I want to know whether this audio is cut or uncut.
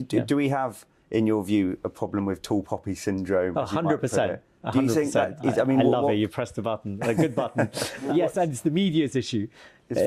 uncut